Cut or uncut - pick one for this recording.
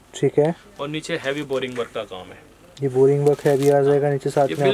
uncut